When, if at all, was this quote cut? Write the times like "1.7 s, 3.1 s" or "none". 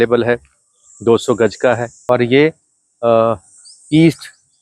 1.9 s